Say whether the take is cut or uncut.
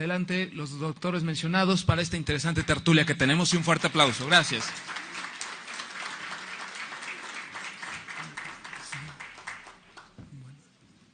uncut